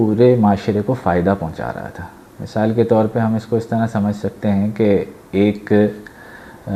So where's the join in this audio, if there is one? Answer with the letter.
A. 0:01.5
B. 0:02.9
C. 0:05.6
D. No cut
D